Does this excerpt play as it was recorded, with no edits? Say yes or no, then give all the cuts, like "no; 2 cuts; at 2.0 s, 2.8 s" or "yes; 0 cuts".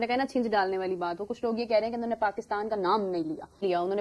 yes; 0 cuts